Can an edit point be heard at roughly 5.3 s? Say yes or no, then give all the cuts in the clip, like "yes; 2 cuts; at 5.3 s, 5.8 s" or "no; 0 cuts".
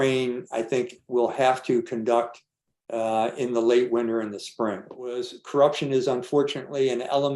yes; 1 cut; at 5.3 s